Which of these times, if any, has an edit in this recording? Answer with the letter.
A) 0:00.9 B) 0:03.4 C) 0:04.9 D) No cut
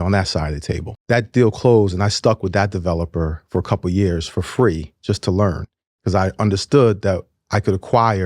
A